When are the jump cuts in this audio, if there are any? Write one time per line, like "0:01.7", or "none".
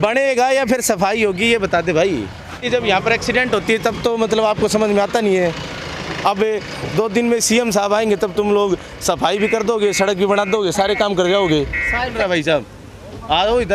0:02.6
0:12.2